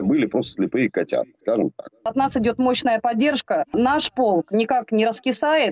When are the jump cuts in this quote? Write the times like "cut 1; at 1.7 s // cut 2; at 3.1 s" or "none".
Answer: cut 1; at 2.0 s // cut 2; at 3.7 s